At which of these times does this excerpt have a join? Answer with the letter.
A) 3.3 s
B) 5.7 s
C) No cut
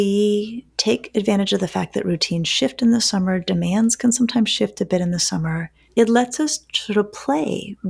B